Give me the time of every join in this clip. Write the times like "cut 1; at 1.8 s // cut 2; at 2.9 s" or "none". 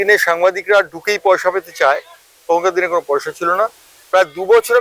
none